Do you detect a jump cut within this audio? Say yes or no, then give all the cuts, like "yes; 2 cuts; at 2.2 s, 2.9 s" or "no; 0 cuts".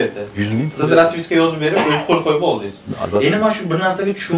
no; 0 cuts